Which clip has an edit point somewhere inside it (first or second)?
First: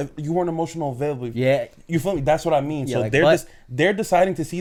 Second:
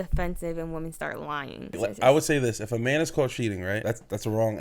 second